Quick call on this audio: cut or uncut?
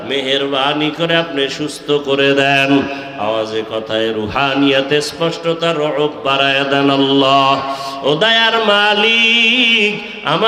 uncut